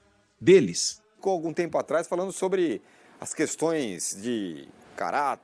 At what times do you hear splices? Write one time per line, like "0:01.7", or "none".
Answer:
0:01.1